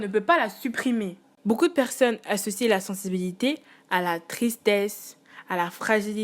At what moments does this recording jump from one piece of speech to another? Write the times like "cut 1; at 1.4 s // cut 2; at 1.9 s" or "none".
cut 1; at 1.3 s